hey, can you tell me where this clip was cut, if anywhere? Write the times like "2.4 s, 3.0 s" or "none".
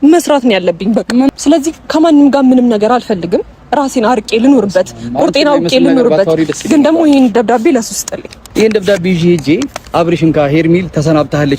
1.3 s, 8.4 s